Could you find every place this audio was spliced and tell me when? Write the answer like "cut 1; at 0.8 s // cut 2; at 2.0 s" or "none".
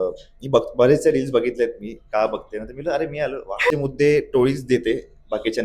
cut 1; at 3.7 s